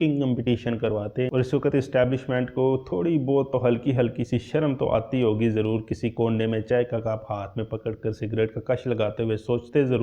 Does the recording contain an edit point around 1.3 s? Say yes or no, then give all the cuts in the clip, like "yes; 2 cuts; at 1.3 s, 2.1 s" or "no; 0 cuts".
yes; 1 cut; at 1.3 s